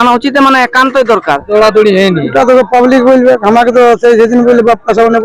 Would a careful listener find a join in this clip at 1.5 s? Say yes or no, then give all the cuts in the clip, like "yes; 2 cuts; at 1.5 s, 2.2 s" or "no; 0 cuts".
yes; 1 cut; at 1.5 s